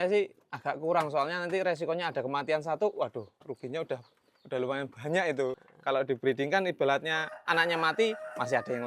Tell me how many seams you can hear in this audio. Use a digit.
1